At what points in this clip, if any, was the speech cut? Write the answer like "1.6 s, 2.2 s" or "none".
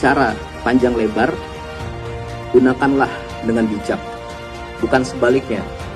none